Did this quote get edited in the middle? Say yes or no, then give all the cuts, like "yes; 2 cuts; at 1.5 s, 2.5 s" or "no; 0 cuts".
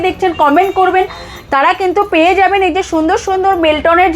no; 0 cuts